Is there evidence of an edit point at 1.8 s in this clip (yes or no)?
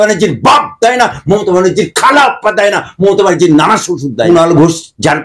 no